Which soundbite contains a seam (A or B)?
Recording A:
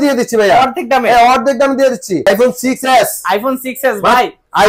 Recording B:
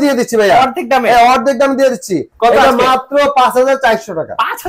A